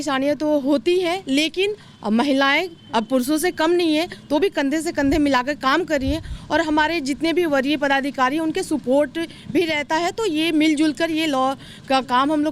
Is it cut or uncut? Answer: uncut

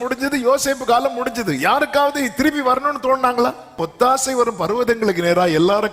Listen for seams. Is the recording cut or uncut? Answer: cut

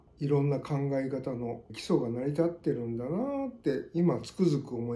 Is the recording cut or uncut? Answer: uncut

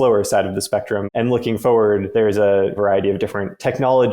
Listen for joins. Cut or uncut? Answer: cut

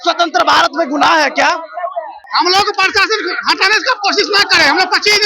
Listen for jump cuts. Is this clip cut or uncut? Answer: cut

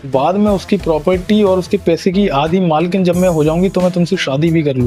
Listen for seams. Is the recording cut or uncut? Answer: uncut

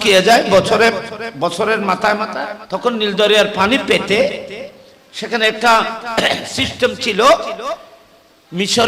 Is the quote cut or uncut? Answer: cut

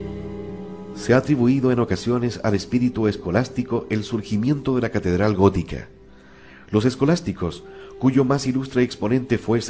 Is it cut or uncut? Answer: uncut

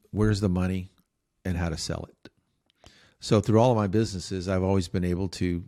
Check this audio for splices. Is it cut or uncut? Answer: uncut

